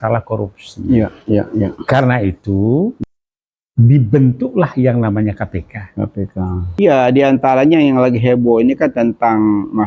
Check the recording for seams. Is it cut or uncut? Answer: cut